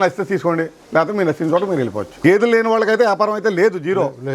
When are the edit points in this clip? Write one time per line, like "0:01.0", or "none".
0:02.0